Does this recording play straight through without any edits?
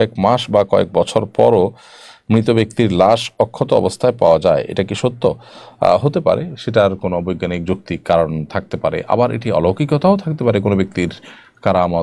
yes; 0 cuts

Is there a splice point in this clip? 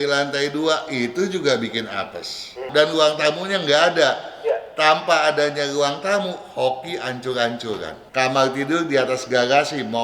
yes; 2 cuts; at 2.7 s, 8.0 s

